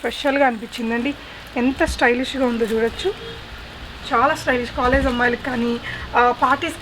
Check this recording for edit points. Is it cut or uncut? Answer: uncut